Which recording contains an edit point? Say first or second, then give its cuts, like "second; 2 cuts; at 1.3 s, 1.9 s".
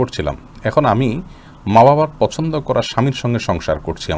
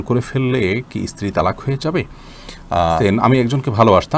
second; 1 cut; at 2.9 s